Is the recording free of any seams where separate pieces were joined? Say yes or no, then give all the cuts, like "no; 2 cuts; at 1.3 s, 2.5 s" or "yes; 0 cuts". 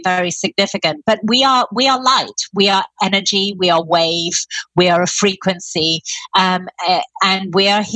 yes; 0 cuts